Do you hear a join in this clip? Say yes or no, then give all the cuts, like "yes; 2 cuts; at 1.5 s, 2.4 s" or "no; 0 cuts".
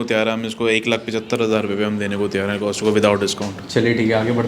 no; 0 cuts